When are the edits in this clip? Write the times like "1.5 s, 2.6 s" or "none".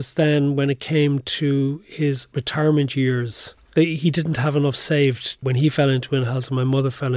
2.3 s, 3.7 s, 5.4 s